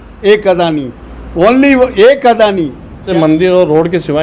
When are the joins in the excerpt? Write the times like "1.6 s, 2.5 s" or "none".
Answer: 3.0 s